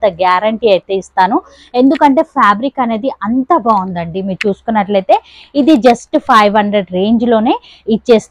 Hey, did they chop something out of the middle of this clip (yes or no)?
no